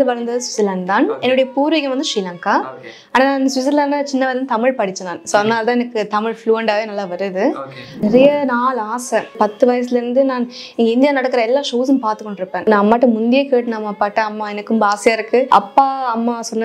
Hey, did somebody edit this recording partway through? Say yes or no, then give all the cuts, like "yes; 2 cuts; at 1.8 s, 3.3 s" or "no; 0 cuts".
yes; 4 cuts; at 8.0 s, 9.3 s, 12.6 s, 15.5 s